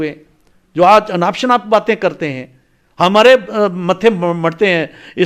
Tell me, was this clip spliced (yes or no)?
no